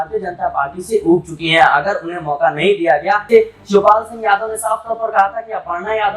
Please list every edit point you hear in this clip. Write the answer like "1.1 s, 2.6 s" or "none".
3.2 s